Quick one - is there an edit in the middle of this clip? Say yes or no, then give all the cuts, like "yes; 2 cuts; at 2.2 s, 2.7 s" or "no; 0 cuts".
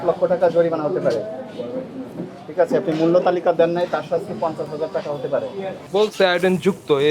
yes; 1 cut; at 5.7 s